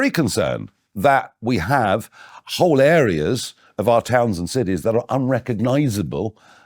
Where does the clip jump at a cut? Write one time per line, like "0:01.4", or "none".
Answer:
none